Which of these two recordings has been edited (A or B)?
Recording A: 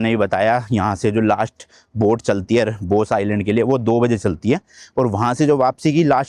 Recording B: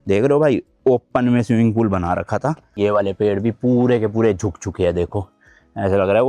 B